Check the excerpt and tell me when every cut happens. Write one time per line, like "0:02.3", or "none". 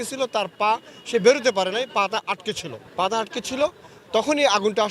0:02.8